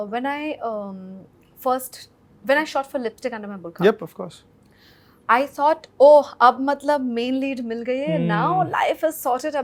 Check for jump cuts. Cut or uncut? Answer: uncut